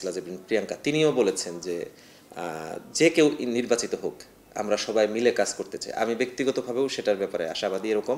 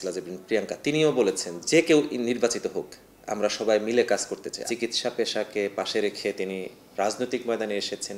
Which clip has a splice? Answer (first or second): second